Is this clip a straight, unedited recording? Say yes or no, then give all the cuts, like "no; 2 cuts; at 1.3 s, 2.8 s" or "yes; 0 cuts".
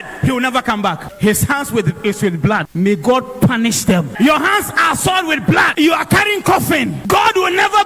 no; 5 cuts; at 1.1 s, 2.7 s, 4.1 s, 5.7 s, 7.0 s